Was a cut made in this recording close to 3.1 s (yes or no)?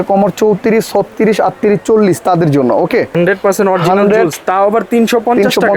yes